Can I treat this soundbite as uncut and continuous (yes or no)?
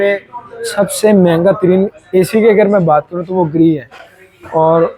yes